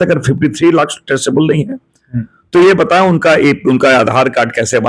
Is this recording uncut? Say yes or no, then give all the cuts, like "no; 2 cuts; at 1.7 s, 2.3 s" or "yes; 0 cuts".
yes; 0 cuts